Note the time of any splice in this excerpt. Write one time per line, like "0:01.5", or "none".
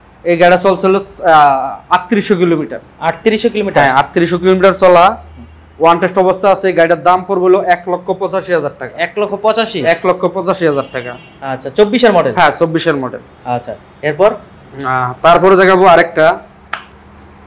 none